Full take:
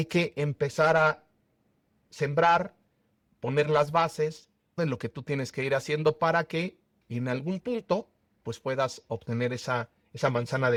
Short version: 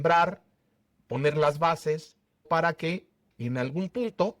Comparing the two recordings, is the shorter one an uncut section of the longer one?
no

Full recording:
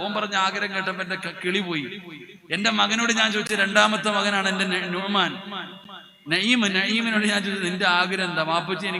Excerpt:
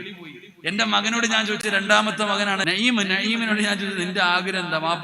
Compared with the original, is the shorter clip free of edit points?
no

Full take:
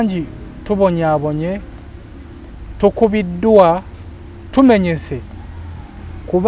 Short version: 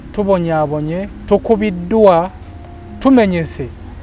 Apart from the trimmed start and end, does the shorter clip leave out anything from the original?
yes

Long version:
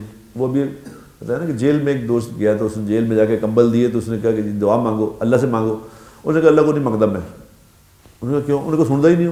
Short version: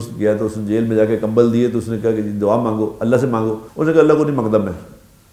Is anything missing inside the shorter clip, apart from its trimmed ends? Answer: yes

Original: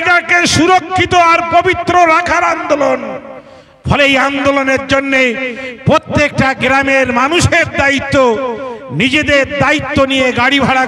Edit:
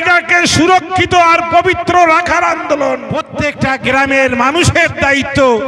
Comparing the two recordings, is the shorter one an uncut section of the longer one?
no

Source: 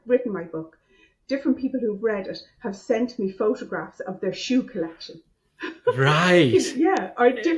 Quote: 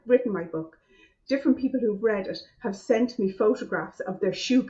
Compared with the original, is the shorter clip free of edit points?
yes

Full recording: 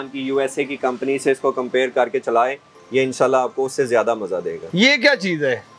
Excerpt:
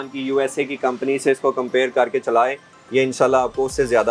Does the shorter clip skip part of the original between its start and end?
no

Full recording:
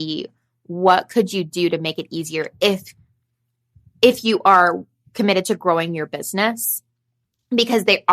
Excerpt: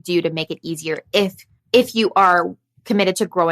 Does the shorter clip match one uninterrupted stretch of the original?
no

